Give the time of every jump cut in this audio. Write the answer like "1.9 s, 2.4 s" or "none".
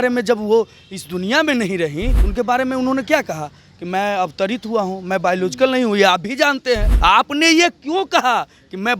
2.2 s, 6.9 s